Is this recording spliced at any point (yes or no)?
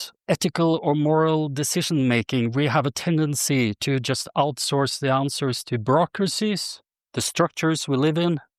no